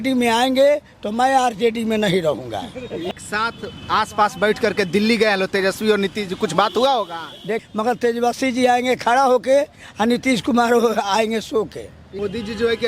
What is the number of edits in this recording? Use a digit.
3